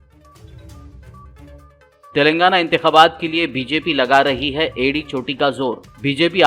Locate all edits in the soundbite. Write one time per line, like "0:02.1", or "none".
0:01.6